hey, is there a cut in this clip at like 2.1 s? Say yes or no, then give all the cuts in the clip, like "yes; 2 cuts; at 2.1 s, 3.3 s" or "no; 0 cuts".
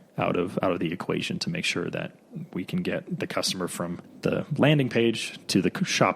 no; 1 cut; at 4.1 s